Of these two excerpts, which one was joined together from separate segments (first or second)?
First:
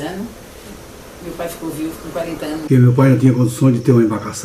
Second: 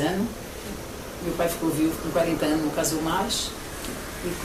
first